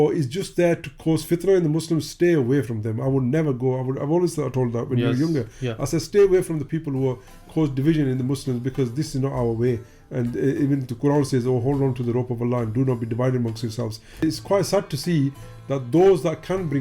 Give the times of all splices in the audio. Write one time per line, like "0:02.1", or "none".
0:14.2